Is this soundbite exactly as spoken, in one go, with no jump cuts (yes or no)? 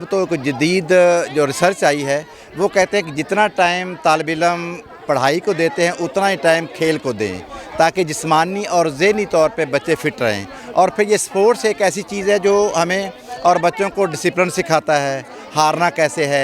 yes